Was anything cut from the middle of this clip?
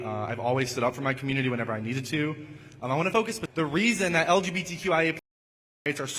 yes; 1 cut; at 3.4 s

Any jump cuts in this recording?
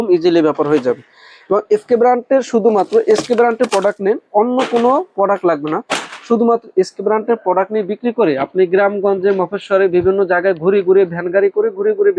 no; 0 cuts

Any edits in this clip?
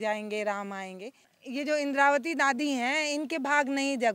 yes; 1 cut; at 1.3 s

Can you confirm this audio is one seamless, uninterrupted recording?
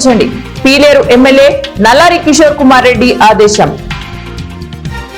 no; 1 cut; at 3.8 s

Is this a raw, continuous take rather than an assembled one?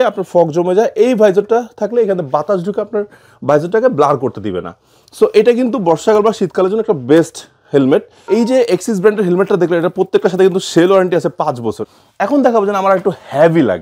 no; 2 cuts; at 8.2 s, 11.8 s

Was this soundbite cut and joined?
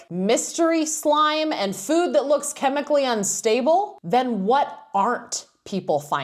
no; 0 cuts

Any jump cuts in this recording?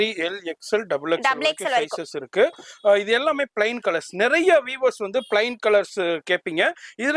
no; 0 cuts

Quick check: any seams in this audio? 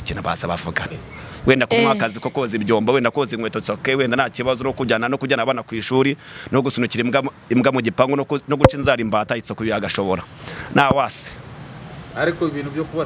no; 0 cuts

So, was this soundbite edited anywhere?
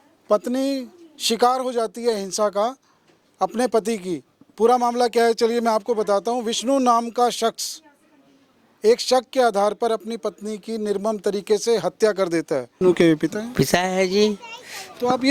yes; 1 cut; at 12.7 s

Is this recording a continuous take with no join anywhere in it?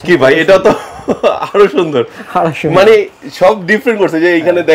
yes; 0 cuts

